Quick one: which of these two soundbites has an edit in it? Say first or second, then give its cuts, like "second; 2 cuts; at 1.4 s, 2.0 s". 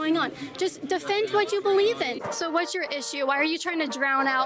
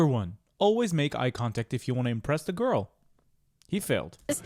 first; 1 cut; at 2.2 s